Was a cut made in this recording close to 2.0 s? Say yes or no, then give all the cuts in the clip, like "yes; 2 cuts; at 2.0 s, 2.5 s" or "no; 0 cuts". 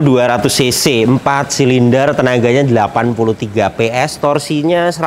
no; 0 cuts